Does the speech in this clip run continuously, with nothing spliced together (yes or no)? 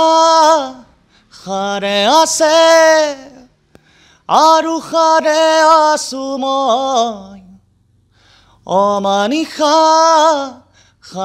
yes